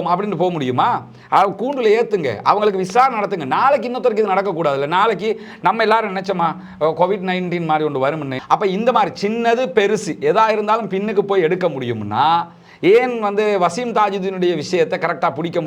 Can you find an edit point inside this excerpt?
yes; 1 cut; at 8.3 s

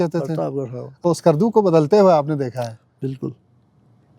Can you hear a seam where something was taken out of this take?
yes; 1 cut; at 1.1 s

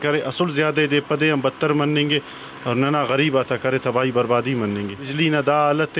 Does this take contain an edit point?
yes; 1 cut; at 5.0 s

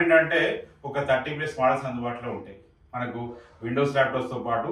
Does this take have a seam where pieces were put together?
no; 0 cuts

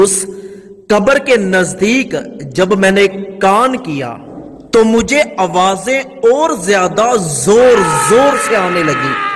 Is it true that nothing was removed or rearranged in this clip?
yes; 0 cuts

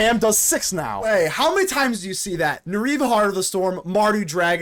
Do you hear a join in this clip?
yes; 1 cut; at 1.1 s

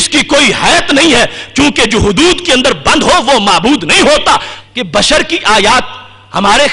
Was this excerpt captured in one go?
no; 1 cut; at 4.5 s

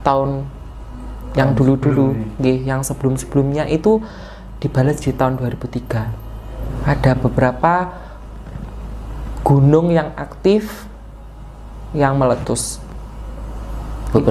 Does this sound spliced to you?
yes; 1 cut; at 6.7 s

